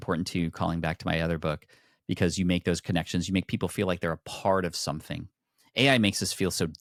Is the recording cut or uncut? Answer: uncut